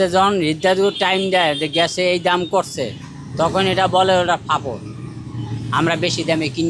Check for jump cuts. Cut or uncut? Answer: uncut